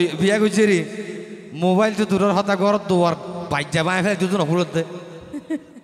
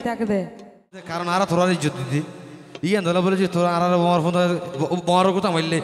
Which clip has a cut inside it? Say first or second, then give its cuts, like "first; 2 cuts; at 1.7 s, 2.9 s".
second; 1 cut; at 1.1 s